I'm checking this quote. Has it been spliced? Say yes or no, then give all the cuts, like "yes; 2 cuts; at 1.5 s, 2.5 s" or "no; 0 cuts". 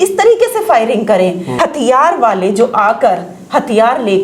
yes; 1 cut; at 1.4 s